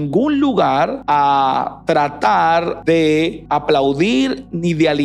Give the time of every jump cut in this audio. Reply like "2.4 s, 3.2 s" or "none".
1.0 s, 2.7 s, 3.4 s